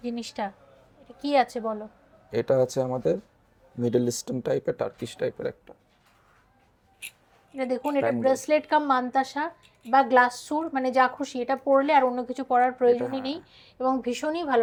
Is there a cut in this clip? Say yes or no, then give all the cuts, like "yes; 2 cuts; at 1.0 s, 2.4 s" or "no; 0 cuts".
no; 0 cuts